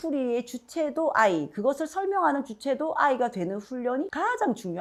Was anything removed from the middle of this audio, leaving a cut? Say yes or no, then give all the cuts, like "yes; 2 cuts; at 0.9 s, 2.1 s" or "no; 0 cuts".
no; 0 cuts